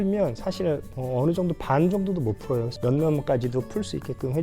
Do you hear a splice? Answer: yes; 2 cuts; at 0.9 s, 2.7 s

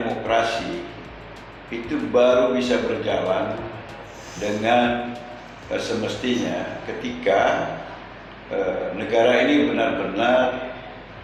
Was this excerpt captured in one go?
yes; 0 cuts

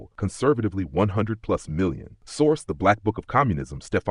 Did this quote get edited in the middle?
no; 0 cuts

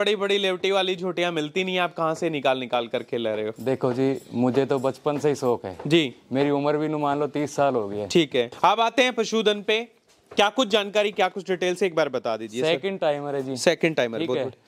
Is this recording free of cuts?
no; 1 cut; at 8.5 s

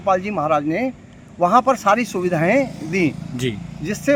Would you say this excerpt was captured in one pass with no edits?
yes; 0 cuts

